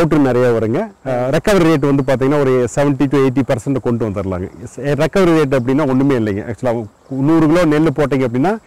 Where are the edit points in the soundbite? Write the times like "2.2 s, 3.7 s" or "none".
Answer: 1.0 s